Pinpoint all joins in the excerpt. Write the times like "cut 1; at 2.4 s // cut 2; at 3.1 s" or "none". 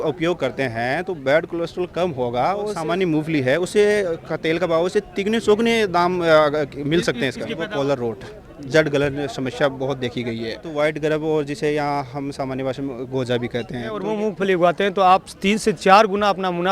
cut 1; at 2.8 s // cut 2; at 7.6 s // cut 3; at 10.6 s // cut 4; at 14.0 s